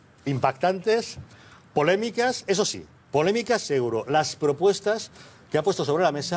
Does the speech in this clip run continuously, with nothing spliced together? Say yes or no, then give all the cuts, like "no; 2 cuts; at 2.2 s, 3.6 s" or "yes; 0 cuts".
yes; 0 cuts